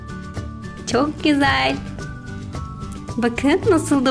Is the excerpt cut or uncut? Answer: cut